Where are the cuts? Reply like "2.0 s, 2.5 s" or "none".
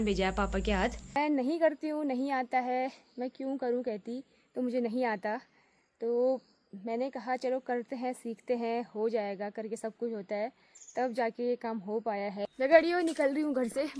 1.0 s, 12.5 s